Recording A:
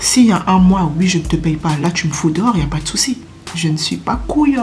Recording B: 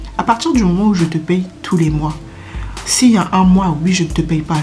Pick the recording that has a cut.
A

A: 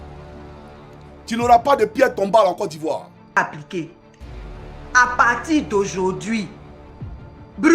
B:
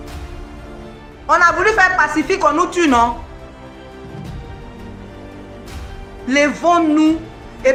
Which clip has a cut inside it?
A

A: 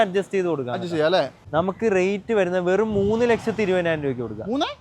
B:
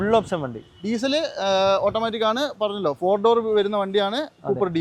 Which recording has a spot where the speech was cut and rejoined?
A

